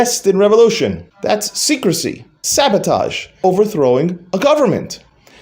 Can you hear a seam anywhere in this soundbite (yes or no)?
yes